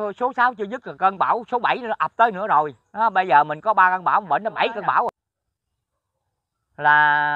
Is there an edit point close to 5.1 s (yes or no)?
yes